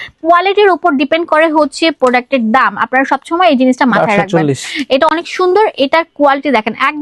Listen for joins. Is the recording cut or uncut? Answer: uncut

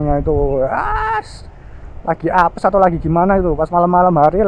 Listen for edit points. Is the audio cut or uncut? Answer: uncut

